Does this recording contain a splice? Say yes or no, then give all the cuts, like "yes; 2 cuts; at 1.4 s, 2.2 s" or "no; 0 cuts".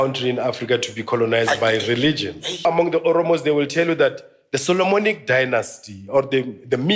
yes; 1 cut; at 2.6 s